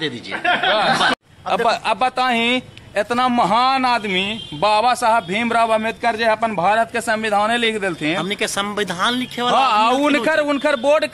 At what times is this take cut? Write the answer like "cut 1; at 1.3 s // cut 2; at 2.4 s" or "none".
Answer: cut 1; at 1.1 s